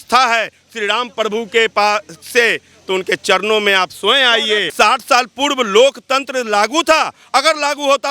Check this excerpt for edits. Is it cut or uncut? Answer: cut